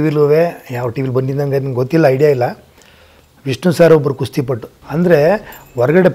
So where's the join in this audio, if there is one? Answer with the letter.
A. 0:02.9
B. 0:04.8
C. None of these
B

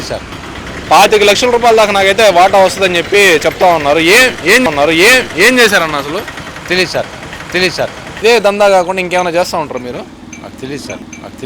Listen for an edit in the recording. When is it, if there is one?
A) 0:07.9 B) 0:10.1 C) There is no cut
A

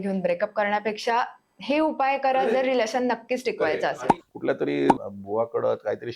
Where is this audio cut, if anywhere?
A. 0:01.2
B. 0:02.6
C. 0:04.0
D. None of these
C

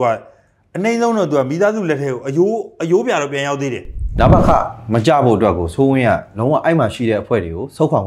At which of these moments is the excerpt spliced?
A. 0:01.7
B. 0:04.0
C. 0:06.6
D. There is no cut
B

